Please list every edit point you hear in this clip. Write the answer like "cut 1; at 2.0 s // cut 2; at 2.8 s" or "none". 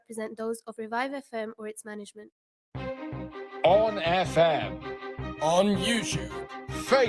cut 1; at 2.6 s